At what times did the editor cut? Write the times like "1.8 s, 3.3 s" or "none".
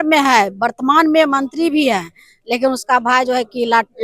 none